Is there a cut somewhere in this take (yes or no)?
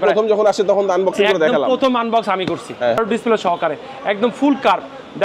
yes